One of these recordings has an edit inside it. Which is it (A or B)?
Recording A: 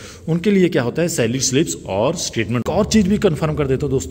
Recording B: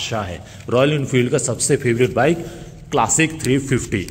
A